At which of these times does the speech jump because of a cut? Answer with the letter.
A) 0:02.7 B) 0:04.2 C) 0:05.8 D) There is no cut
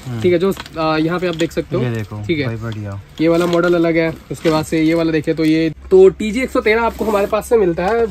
C